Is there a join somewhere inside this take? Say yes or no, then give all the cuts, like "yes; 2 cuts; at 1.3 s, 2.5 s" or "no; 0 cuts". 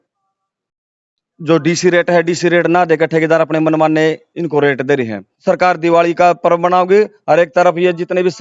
yes; 1 cut; at 5.2 s